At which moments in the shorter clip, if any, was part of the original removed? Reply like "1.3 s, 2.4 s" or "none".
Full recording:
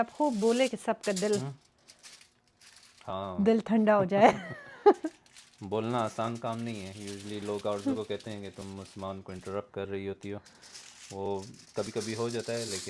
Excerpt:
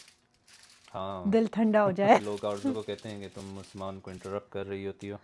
2.2 s